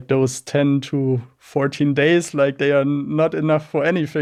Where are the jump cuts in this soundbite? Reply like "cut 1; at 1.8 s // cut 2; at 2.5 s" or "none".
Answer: none